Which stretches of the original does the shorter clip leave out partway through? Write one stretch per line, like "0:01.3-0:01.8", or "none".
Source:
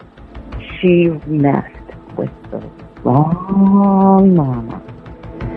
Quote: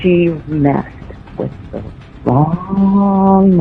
none

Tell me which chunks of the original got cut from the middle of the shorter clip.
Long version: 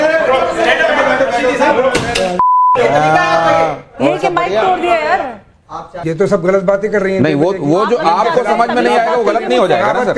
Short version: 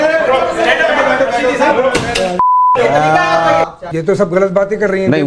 0:03.8-0:05.9

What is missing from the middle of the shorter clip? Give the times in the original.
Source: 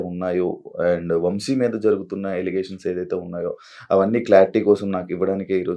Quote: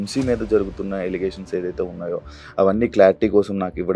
none

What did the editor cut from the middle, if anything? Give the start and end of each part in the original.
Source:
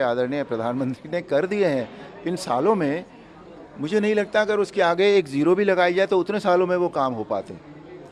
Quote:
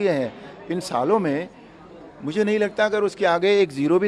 none

